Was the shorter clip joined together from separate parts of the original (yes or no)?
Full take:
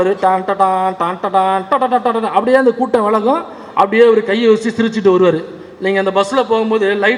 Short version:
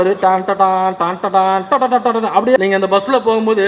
yes